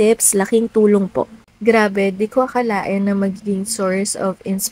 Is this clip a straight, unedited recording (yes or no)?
no